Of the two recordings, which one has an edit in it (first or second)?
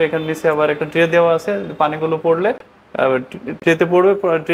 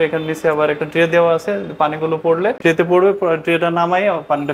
second